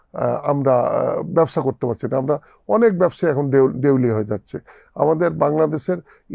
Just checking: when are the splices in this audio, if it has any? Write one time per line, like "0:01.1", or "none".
none